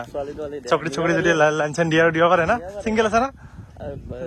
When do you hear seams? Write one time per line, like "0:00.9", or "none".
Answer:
none